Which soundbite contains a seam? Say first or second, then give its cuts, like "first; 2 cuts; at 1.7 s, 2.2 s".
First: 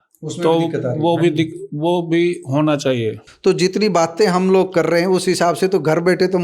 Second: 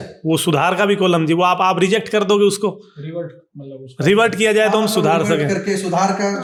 first; 1 cut; at 3.2 s